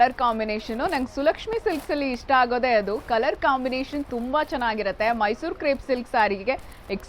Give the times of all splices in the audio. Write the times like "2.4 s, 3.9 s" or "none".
none

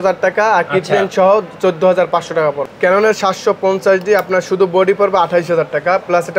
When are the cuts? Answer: 2.6 s

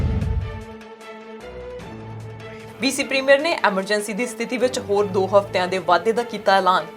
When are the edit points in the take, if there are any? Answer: 2.7 s

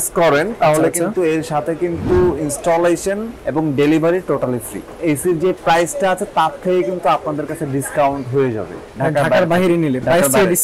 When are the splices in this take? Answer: 3.3 s, 4.9 s

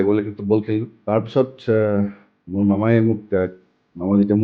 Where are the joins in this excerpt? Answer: 0.9 s

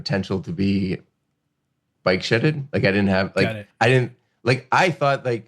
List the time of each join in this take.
1.9 s, 3.6 s

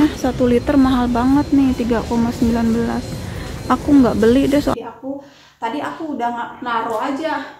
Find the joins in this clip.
4.7 s

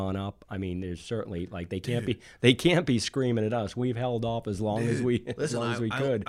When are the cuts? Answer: none

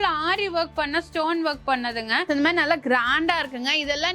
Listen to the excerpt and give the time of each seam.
2.2 s

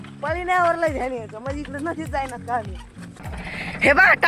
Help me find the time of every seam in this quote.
3.3 s

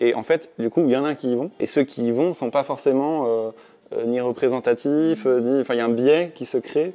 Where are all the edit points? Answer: 1.5 s

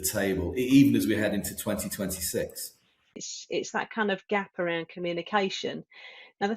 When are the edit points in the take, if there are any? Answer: 3.2 s

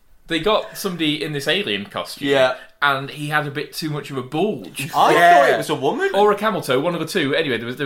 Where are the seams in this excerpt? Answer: 6.1 s

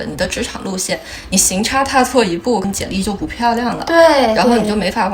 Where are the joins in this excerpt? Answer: none

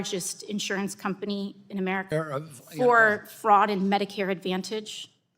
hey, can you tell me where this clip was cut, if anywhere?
2.1 s

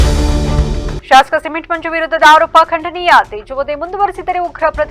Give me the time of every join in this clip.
1.0 s

